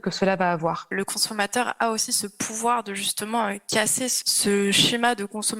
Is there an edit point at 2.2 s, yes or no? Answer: no